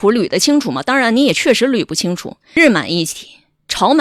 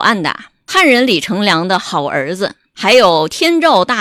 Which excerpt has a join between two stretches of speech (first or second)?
first